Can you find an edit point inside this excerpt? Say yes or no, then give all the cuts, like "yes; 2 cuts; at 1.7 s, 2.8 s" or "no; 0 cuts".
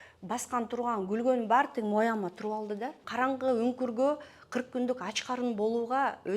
yes; 1 cut; at 3.0 s